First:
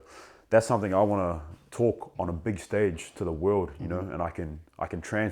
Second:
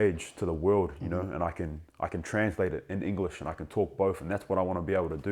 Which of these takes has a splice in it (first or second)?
first